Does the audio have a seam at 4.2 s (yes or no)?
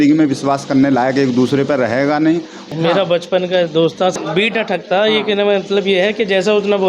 yes